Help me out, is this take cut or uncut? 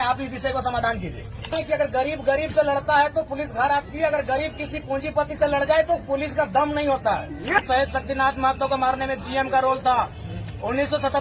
cut